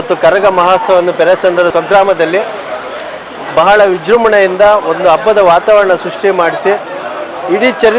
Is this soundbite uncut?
no; 1 cut; at 1.7 s

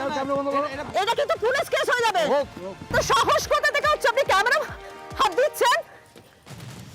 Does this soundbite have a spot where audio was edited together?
yes; 1 cut; at 2.9 s

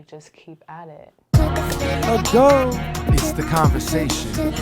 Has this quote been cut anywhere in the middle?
yes; 1 cut; at 1.3 s

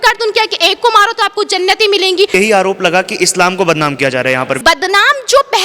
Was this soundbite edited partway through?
yes; 2 cuts; at 2.3 s, 4.6 s

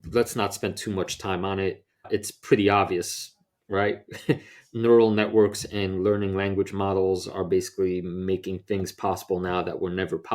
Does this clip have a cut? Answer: no; 0 cuts

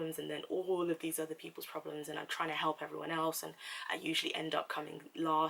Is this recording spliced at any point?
no; 0 cuts

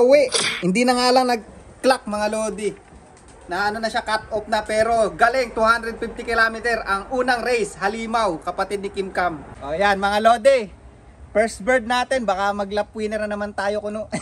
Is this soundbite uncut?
no; 1 cut; at 9.5 s

